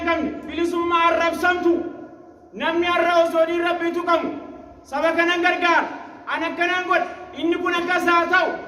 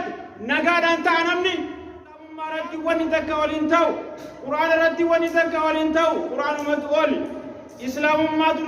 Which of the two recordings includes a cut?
second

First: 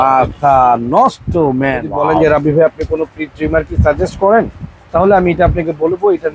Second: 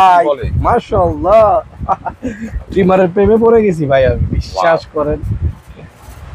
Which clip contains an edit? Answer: first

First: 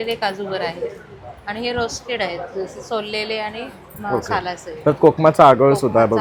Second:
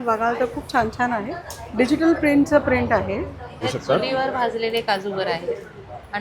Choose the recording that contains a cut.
second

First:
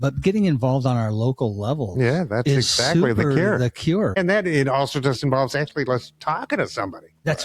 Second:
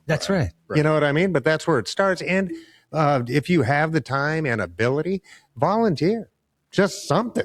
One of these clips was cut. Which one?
first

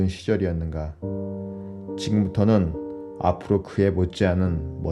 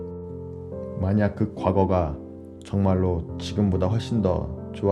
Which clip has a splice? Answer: first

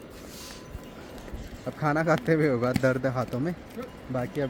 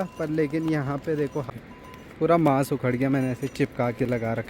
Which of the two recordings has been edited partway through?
second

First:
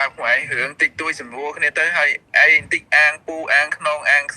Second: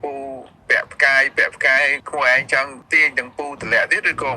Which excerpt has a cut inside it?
second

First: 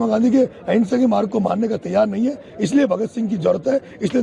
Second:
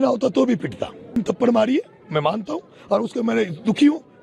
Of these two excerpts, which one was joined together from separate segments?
second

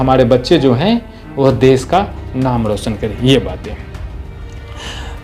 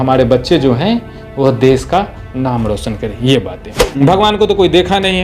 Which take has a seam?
second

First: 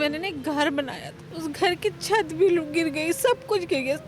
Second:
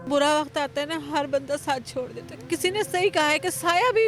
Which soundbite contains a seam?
first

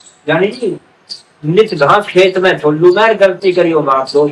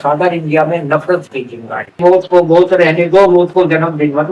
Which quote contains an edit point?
second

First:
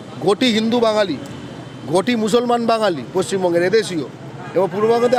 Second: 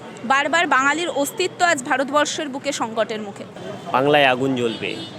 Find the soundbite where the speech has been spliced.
second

